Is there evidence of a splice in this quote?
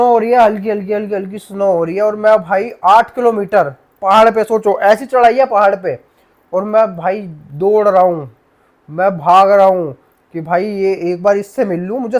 no; 0 cuts

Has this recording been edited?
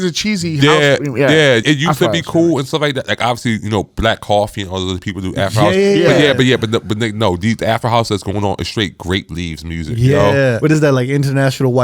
yes; 2 cuts; at 1.6 s, 10.6 s

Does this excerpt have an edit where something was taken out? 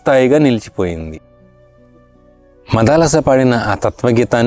no; 0 cuts

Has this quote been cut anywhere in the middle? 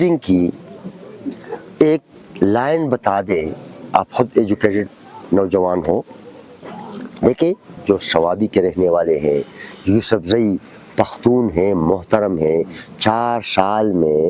yes; 1 cut; at 7.8 s

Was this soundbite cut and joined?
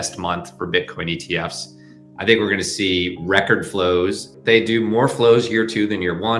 yes; 1 cut; at 4.3 s

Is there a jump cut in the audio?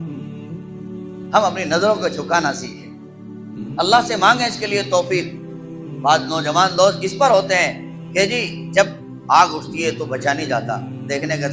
no; 0 cuts

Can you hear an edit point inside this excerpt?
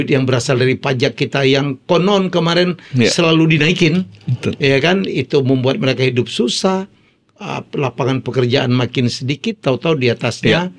no; 0 cuts

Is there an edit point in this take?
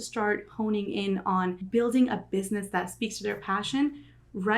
yes; 1 cut; at 1.6 s

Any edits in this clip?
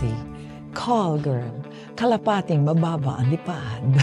no; 0 cuts

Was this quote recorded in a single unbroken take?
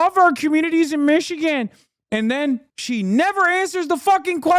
no; 1 cut; at 2.7 s

